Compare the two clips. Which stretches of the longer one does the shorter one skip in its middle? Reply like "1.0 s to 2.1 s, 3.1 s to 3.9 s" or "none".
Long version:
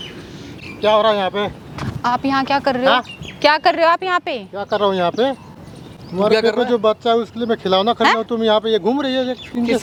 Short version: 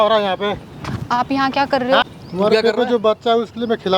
3.1 s to 6.0 s